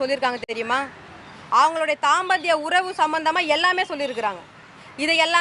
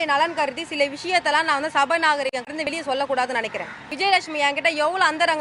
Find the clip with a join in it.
second; 1 cut; at 3.9 s

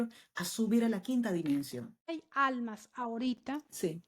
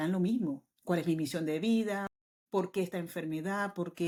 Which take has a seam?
first; 1 cut; at 2.0 s

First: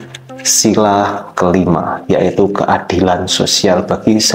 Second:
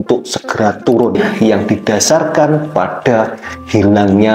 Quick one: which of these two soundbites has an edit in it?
second; 1 cut; at 1.2 s

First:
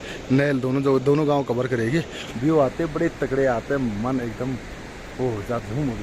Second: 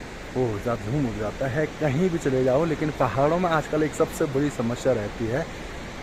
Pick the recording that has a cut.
first; 1 cut; at 2.2 s

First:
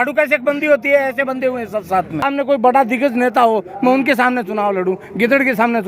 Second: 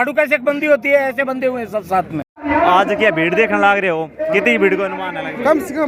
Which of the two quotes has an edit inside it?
first; 1 cut; at 2.2 s

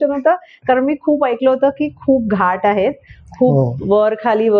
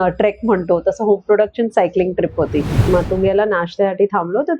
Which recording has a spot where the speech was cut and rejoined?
second; 1 cut; at 2.8 s

